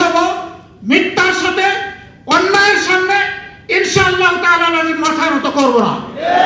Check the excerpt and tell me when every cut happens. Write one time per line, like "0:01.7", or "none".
none